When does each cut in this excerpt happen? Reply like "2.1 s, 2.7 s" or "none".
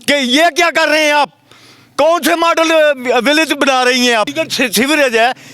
4.3 s